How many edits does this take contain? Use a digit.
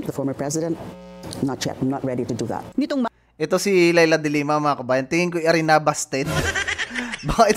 0